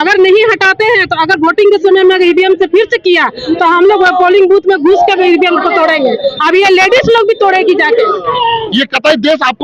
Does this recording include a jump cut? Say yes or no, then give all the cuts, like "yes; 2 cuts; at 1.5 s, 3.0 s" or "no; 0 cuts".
yes; 1 cut; at 8.6 s